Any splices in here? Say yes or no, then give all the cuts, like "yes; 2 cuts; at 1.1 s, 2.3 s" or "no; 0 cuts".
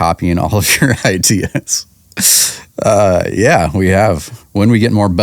yes; 1 cut; at 4.3 s